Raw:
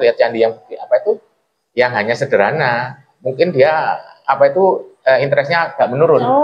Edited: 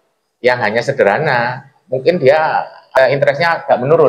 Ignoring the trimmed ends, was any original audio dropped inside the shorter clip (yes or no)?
yes